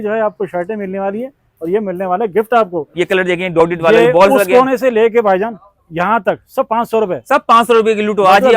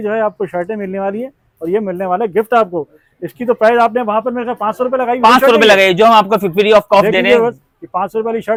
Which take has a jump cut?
first; 1 cut; at 2.8 s

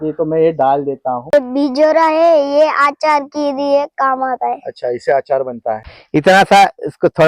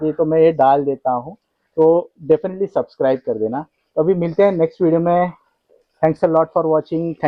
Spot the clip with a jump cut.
first; 2 cuts; at 1.3 s, 5.9 s

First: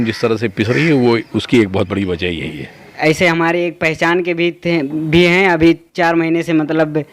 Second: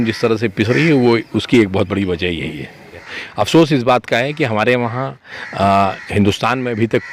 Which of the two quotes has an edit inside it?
first; 1 cut; at 2.9 s

